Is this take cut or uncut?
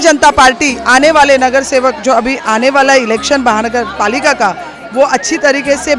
uncut